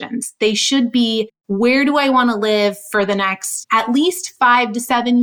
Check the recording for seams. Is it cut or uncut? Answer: cut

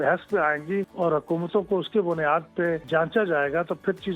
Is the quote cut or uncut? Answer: cut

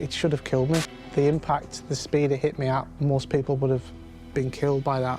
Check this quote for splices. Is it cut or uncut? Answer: cut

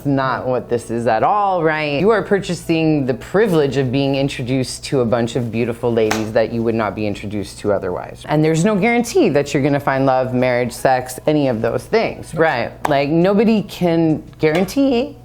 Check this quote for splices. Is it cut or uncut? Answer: cut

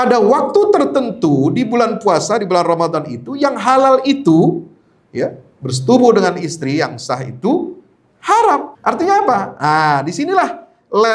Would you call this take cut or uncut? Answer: cut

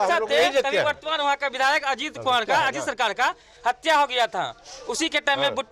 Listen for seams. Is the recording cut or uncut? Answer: uncut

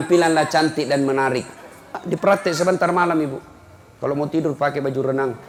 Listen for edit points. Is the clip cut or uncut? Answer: uncut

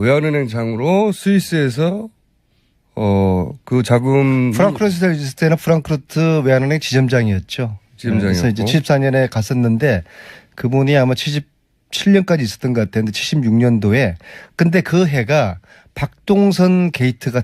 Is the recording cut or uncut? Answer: cut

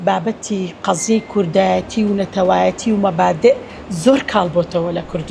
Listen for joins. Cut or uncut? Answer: uncut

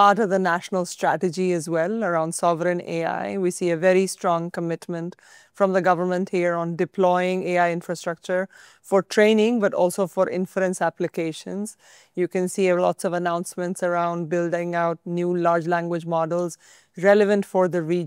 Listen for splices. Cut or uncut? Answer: uncut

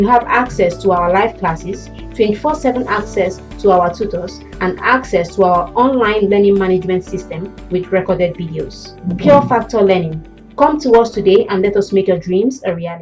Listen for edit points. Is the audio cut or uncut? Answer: uncut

